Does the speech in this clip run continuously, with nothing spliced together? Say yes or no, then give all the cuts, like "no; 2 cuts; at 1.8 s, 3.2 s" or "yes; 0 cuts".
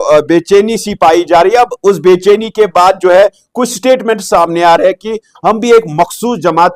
yes; 0 cuts